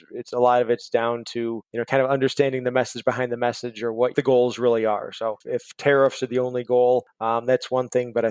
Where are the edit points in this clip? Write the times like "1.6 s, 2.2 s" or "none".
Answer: 1.7 s, 5.4 s, 7.1 s